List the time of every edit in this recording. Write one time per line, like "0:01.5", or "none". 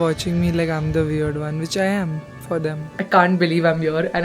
0:03.0